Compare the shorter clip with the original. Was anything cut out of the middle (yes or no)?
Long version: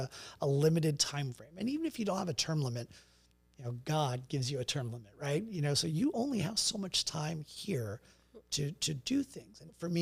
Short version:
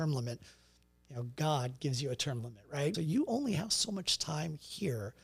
yes